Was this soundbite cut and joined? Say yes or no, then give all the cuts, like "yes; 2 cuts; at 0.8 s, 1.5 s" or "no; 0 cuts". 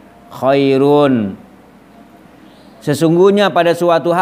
no; 0 cuts